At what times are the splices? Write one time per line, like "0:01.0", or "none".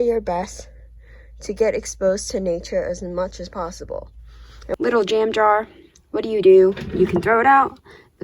0:04.8